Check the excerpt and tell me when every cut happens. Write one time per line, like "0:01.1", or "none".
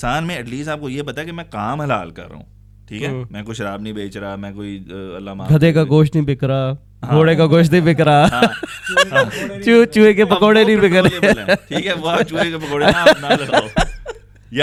none